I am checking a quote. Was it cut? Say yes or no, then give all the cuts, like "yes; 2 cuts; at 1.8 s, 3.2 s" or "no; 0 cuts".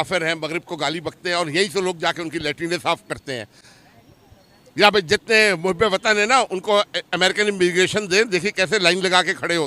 no; 0 cuts